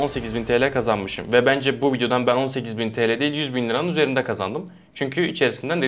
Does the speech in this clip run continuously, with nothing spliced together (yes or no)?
yes